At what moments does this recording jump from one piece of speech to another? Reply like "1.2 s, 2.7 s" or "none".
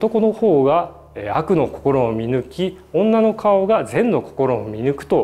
none

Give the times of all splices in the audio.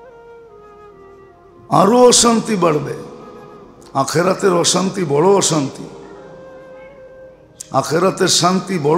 1.0 s, 6.2 s, 7.4 s

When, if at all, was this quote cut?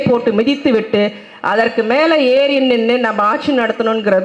none

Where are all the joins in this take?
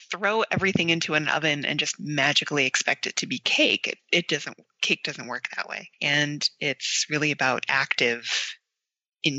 none

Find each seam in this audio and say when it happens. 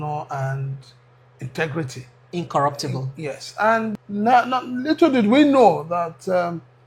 4.0 s

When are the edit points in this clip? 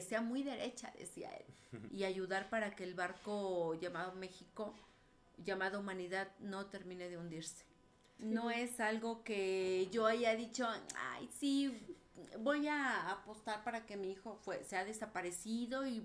1.7 s, 8.1 s

